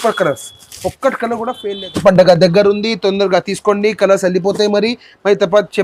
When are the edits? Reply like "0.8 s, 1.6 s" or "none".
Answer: 1.6 s